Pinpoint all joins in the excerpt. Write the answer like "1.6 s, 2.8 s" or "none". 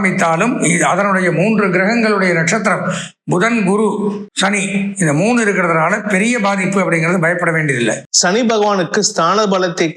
4.3 s, 8.1 s